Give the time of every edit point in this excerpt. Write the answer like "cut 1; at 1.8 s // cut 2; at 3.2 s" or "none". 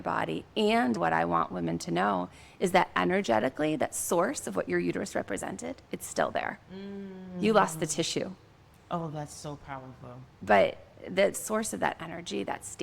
cut 1; at 1.0 s // cut 2; at 11.4 s